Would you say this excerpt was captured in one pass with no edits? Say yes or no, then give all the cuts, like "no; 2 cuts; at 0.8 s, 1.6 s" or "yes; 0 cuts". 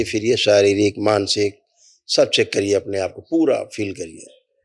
yes; 0 cuts